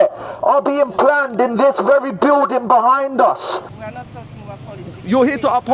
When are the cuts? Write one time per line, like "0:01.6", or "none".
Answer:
0:03.6